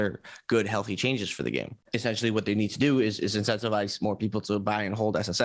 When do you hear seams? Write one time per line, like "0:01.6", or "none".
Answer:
0:01.8